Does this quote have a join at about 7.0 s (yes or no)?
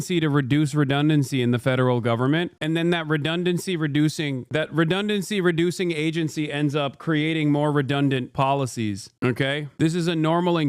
no